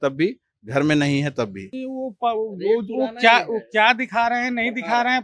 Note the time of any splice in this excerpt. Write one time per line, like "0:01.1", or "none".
0:01.8